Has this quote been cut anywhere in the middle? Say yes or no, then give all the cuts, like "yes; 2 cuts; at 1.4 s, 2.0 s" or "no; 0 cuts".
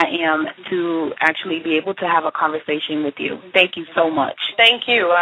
no; 0 cuts